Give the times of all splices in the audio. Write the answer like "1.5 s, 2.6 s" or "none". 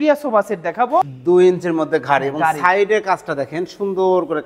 1.1 s